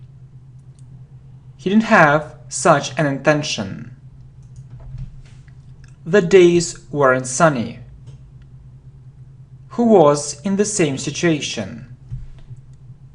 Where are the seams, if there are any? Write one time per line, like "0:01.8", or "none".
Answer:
0:01.0

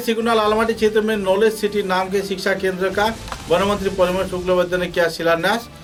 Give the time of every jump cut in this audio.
none

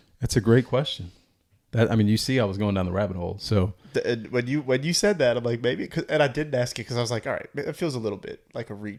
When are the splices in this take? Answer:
none

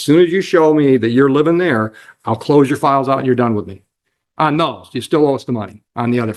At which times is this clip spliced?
none

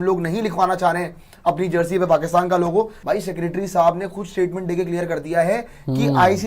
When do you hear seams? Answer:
0:03.0

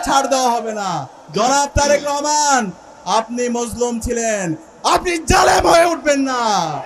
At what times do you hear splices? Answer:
0:01.1

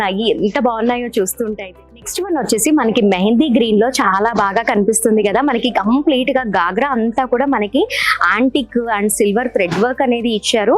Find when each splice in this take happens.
0:01.8

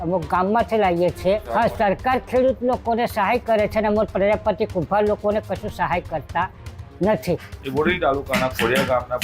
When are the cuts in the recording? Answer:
0:01.4
0:07.5

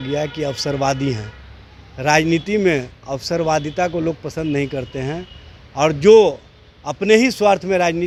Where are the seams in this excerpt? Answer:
none

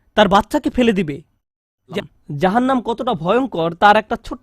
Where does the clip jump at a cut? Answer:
0:01.8

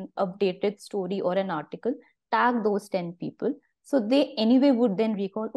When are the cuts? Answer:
none

